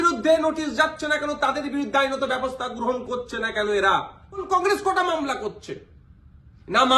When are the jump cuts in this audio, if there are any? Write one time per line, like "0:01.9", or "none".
0:04.5

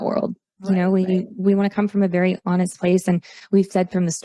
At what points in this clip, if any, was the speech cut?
none

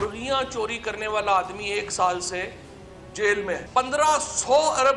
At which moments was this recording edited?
0:03.6

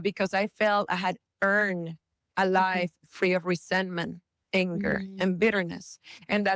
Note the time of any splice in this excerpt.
none

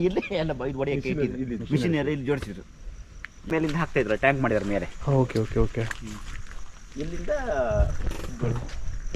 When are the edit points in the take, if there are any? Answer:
none

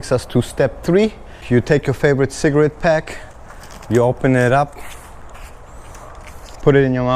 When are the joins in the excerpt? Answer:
0:01.3

